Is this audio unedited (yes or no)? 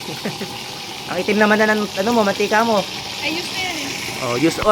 yes